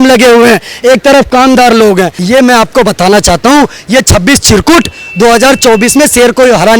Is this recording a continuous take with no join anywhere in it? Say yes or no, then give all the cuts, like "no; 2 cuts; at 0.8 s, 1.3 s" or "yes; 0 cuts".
no; 1 cut; at 2.2 s